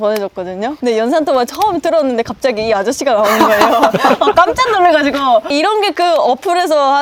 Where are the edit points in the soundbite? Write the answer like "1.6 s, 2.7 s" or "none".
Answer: none